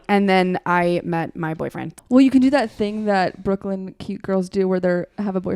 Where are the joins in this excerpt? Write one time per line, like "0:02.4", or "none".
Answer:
0:01.9

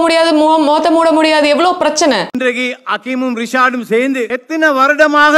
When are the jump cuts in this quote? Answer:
0:02.3
0:04.3

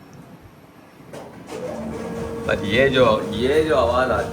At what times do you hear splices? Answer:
none

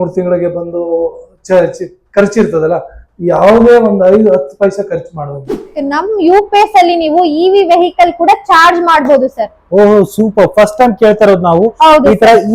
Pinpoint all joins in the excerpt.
0:05.7

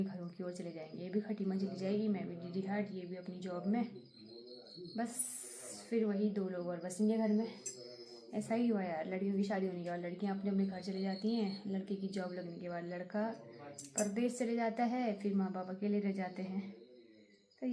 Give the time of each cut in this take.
none

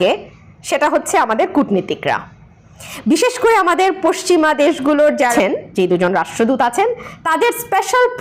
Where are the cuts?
0:05.3

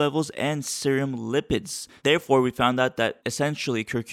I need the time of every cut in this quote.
0:02.0

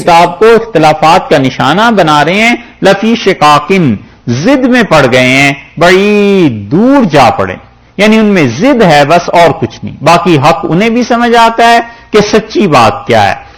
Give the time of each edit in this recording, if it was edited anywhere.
none

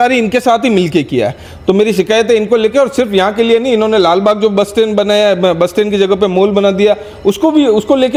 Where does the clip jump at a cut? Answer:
none

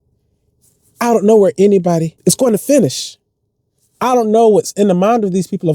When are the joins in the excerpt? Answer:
0:02.1

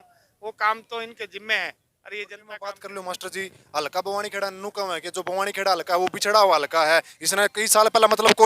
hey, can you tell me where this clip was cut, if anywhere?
0:02.4

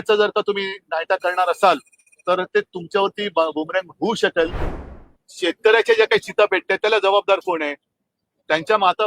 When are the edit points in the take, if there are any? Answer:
0:04.6

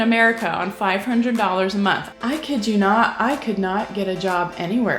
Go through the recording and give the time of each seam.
0:02.1

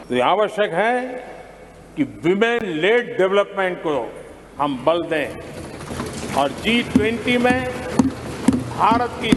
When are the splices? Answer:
none

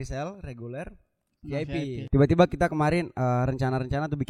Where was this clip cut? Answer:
0:02.0

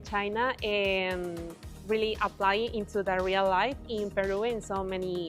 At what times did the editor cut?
none

